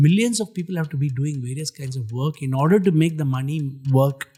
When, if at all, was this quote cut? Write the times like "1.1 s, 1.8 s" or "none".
none